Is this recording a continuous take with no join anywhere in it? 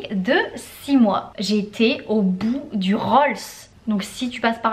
no; 2 cuts; at 1.3 s, 3.7 s

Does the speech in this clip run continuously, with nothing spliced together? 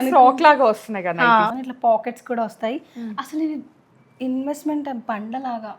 no; 1 cut; at 1.5 s

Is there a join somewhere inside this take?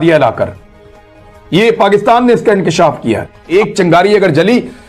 yes; 1 cut; at 3.3 s

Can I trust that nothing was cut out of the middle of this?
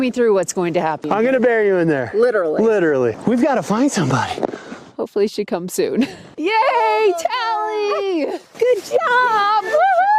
no; 2 cuts; at 3.2 s, 6.2 s

